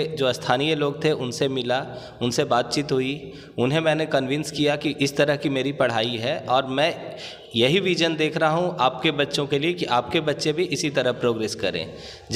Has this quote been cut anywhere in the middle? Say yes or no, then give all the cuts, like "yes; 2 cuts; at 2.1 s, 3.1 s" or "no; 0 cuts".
no; 0 cuts